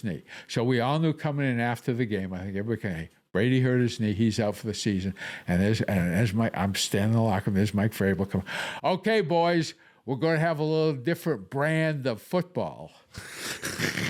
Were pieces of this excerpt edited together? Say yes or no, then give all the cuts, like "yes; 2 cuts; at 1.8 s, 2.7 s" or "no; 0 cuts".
no; 0 cuts